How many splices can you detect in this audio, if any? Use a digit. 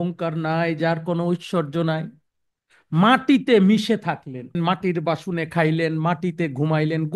1